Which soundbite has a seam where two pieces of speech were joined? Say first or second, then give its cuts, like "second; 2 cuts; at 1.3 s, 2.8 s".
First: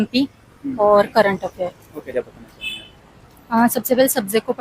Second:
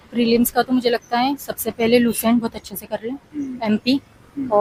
first; 1 cut; at 2.1 s